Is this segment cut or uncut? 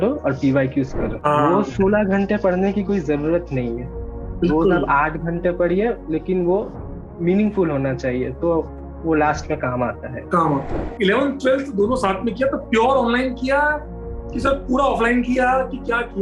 cut